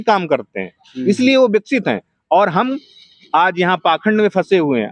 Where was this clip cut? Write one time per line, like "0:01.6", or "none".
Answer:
none